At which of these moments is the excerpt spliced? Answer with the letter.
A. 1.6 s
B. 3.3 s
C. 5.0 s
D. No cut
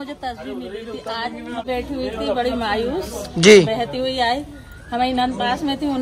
A